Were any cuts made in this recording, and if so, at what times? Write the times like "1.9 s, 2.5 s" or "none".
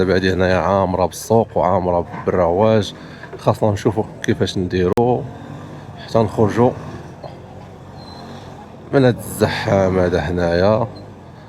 none